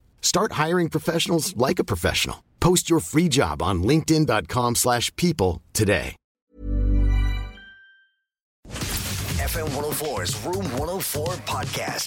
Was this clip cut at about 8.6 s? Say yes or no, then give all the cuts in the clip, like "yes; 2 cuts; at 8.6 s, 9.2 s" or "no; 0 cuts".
yes; 2 cuts; at 6.4 s, 8.6 s